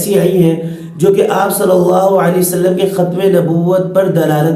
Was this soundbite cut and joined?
no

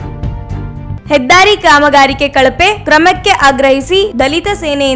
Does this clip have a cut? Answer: no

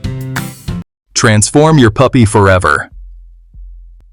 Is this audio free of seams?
no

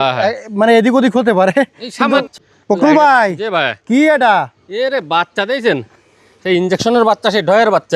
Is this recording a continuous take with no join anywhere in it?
no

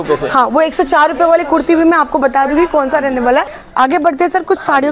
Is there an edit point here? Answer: yes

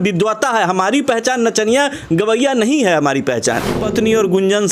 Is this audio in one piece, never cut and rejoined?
no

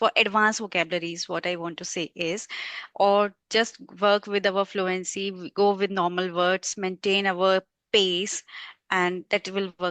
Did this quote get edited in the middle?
no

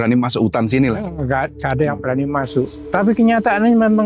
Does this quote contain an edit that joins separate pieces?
yes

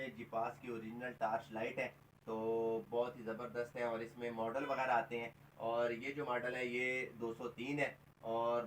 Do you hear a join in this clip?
no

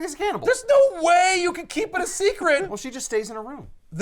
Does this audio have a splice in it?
yes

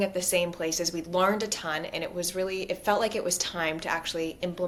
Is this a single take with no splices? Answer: yes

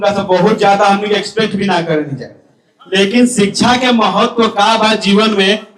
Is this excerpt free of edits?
yes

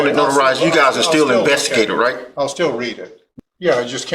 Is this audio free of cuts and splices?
no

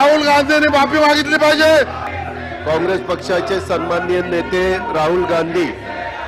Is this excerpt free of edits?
no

